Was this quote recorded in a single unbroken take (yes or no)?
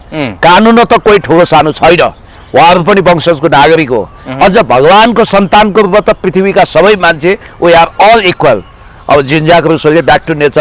yes